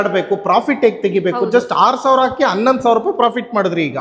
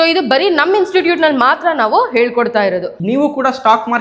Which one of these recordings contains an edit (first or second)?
second